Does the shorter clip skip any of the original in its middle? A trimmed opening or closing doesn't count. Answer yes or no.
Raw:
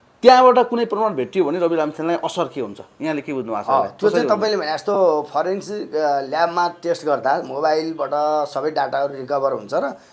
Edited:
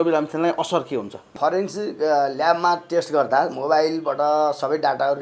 yes